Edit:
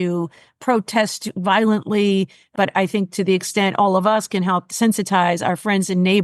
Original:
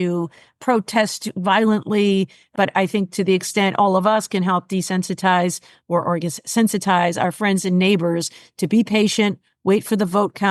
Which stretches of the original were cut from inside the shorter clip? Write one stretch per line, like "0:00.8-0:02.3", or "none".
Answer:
0:04.7-0:06.4